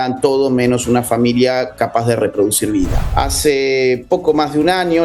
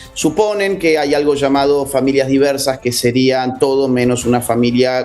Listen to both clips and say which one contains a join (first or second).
first